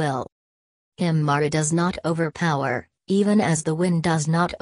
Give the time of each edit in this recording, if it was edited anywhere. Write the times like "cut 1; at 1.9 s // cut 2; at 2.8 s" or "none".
none